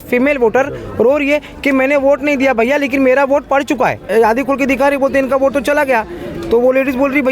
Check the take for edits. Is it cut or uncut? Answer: cut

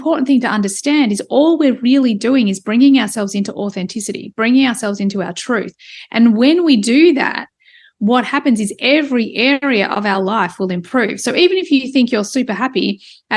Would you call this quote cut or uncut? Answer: uncut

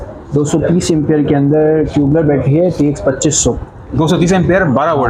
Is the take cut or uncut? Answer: uncut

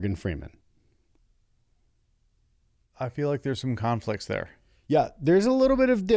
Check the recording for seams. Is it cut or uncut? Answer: uncut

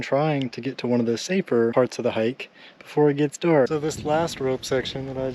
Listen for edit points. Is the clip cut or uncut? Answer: cut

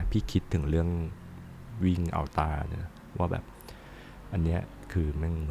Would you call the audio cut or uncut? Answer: cut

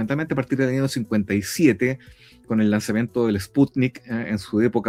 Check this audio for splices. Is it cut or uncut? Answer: uncut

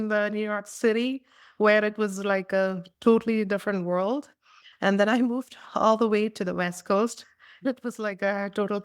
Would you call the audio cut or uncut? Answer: cut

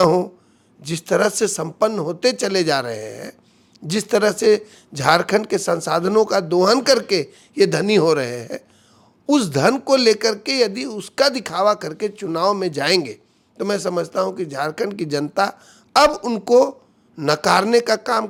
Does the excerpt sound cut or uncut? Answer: uncut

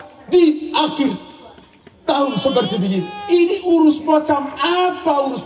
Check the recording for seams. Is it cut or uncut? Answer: uncut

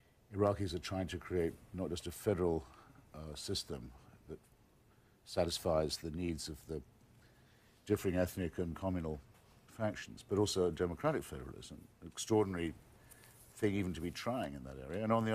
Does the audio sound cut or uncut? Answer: cut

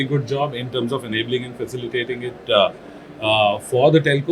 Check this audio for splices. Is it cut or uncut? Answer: uncut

